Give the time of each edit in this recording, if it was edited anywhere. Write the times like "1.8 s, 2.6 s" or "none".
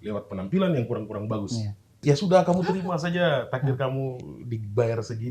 1.9 s